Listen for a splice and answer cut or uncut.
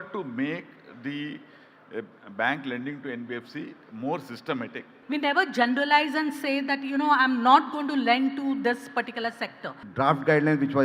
cut